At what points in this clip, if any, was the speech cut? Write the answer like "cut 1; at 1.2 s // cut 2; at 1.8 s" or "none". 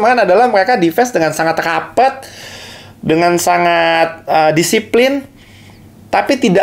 none